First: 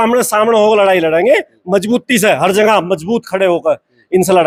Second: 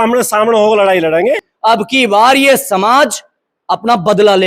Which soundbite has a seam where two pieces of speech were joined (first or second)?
second